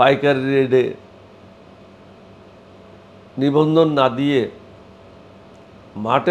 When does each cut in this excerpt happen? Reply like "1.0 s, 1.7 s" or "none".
none